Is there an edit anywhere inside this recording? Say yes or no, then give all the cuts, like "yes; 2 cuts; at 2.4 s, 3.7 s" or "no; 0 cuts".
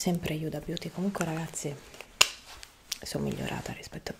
no; 0 cuts